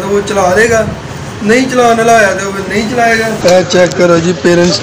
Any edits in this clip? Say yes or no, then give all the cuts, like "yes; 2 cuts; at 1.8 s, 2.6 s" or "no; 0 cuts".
yes; 1 cut; at 3.3 s